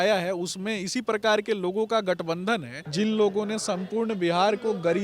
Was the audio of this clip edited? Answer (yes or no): yes